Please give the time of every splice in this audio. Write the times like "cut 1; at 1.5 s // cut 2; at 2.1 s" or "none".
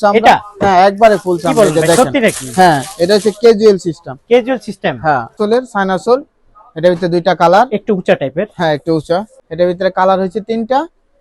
cut 1; at 5.4 s // cut 2; at 9.4 s